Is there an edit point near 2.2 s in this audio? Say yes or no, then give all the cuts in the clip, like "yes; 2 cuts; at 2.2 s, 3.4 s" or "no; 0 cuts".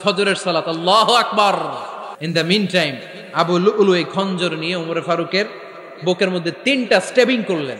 yes; 1 cut; at 2.2 s